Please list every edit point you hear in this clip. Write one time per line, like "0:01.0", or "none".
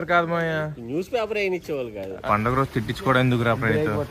0:02.2